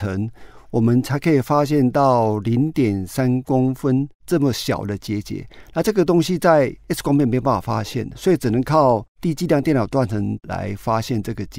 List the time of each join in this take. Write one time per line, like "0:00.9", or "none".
0:06.8
0:09.1
0:10.4